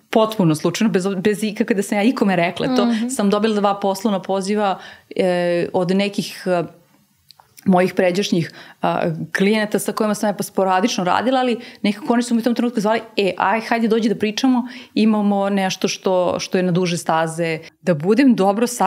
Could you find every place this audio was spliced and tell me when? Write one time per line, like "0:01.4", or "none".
0:17.7